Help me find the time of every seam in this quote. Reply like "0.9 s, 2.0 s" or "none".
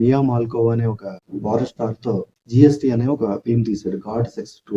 none